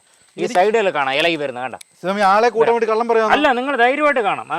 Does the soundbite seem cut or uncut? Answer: uncut